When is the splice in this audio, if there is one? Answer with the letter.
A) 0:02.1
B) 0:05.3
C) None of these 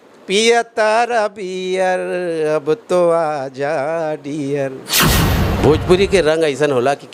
B